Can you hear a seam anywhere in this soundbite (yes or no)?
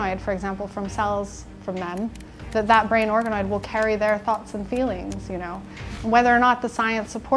no